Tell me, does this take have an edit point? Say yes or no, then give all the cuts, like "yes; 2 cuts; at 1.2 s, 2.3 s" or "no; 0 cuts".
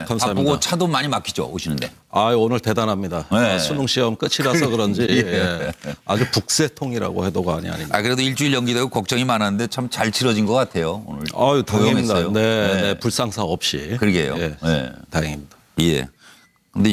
no; 0 cuts